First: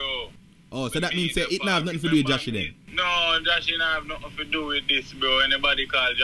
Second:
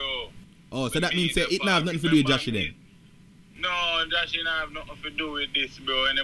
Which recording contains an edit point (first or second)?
first